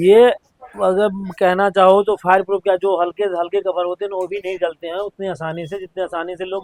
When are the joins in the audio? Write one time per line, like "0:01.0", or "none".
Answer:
none